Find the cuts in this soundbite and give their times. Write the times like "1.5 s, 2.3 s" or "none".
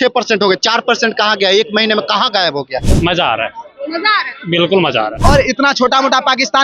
2.9 s, 5.1 s